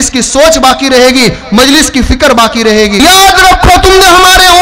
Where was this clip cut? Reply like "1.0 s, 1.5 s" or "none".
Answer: 3.0 s